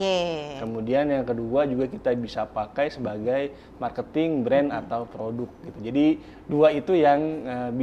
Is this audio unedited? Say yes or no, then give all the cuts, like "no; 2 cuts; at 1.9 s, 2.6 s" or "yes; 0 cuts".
yes; 0 cuts